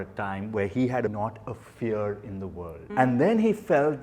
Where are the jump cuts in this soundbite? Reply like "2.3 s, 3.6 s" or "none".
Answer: 1.1 s, 2.8 s